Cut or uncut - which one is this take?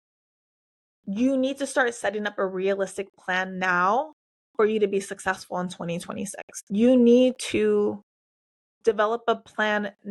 cut